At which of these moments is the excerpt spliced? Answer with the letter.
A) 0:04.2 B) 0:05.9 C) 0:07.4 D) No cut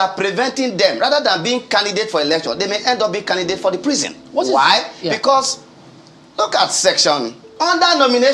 C